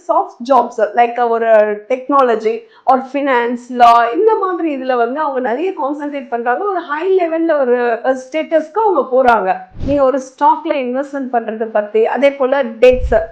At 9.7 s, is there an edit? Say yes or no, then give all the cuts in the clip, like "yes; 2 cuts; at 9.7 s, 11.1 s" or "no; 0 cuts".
yes; 1 cut; at 9.7 s